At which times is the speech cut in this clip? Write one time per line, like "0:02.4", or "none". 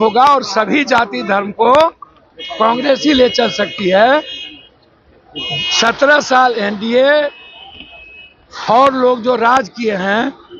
none